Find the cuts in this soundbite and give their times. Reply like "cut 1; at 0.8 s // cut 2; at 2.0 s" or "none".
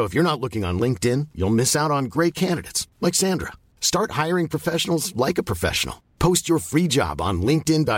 none